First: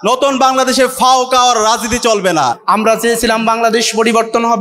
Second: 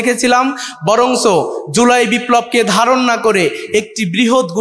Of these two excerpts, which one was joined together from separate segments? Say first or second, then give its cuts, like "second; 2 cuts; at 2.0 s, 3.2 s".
first; 1 cut; at 2.6 s